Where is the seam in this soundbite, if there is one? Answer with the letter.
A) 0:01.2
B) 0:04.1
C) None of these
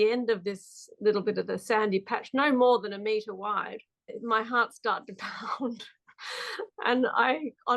B